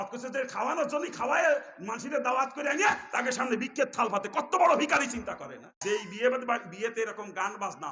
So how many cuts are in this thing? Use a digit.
1